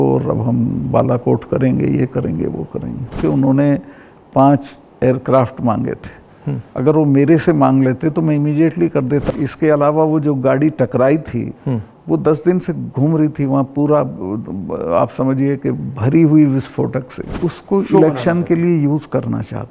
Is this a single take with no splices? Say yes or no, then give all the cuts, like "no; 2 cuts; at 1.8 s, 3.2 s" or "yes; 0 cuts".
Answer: no; 3 cuts; at 3.2 s, 9.3 s, 17.3 s